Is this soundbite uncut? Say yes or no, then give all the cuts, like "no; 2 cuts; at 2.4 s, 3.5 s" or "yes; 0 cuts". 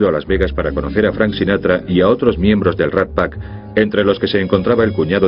yes; 0 cuts